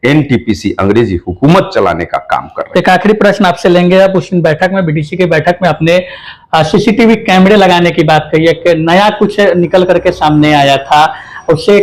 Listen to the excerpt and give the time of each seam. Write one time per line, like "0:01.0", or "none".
none